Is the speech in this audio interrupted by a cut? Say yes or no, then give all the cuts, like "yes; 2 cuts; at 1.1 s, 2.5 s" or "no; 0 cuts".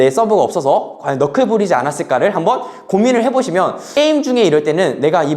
yes; 1 cut; at 3.8 s